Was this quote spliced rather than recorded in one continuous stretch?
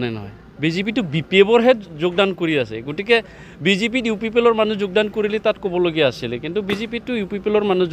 no; 0 cuts

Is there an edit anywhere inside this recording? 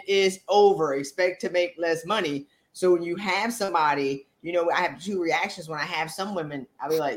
no; 0 cuts

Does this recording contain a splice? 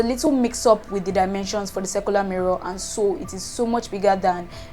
no; 0 cuts

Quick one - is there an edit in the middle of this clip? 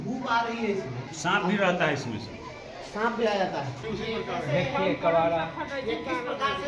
yes; 2 cuts; at 1.0 s, 3.8 s

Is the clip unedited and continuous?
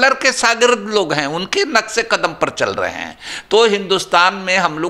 yes; 0 cuts

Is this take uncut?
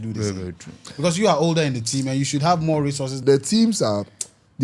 no; 1 cut; at 3.1 s

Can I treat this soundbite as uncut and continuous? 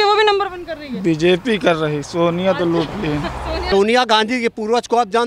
no; 1 cut; at 3.6 s

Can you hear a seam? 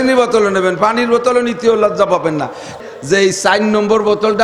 yes; 1 cut; at 2.7 s

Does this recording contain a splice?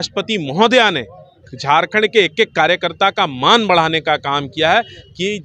no; 0 cuts

